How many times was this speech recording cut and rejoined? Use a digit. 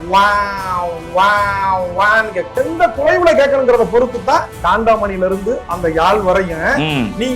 2